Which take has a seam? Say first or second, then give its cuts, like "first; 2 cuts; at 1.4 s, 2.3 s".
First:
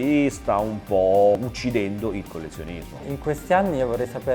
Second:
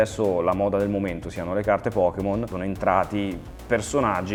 first; 2 cuts; at 1.4 s, 3.1 s